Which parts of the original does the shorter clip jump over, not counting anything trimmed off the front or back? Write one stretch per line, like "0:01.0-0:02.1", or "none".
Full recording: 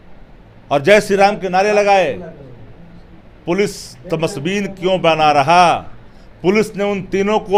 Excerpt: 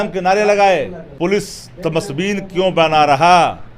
0:02.3-0:03.3